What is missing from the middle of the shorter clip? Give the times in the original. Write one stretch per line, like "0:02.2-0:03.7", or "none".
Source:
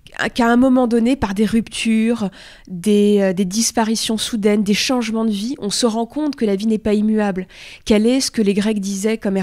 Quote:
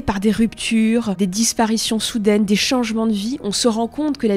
0:02.3-0:03.4

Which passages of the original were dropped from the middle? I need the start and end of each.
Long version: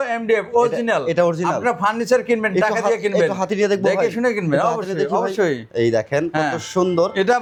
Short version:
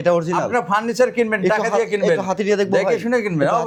none

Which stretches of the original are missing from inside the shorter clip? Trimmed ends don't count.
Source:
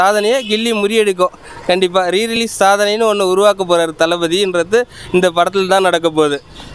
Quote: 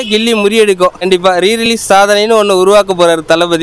0:01.4-0:01.8

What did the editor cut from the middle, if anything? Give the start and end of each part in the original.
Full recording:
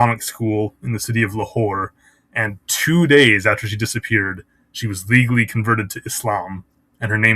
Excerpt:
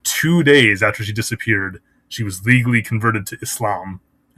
none

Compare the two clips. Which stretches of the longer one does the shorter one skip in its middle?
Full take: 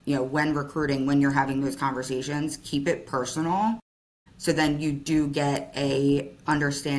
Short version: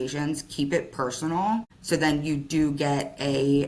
0:03.9-0:04.3

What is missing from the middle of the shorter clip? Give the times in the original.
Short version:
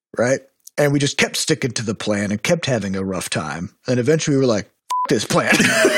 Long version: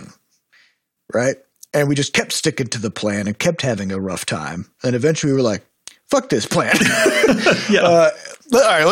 0:06.0-0:06.3

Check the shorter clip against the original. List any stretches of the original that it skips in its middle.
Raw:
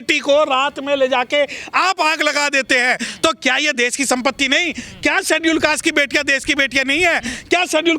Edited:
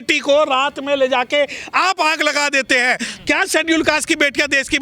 0:03.1-0:04.8

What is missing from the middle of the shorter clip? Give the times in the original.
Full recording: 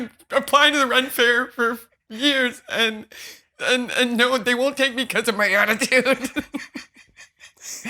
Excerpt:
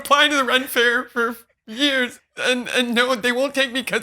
0:02.6-0:03.4

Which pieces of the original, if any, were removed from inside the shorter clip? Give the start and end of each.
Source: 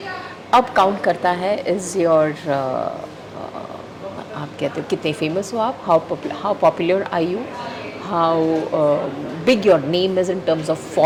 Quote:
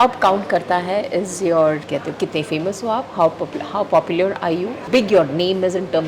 0:02.4-0:04.5
0:07.5-0:09.3

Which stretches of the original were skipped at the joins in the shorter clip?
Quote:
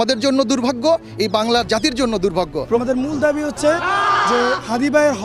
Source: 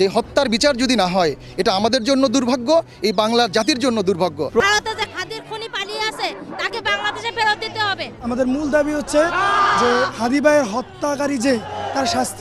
0:04.6-0:08.3

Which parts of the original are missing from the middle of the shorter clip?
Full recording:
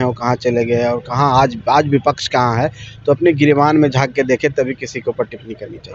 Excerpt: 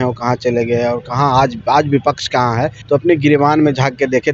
0:02.8-0:02.9

